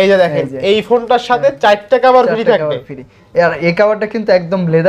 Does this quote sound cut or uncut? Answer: uncut